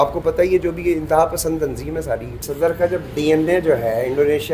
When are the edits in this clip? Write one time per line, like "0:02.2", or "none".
0:02.5